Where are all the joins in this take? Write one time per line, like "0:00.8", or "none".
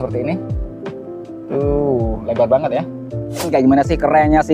0:03.5